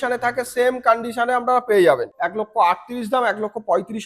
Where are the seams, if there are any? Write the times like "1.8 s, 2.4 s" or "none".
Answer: 2.1 s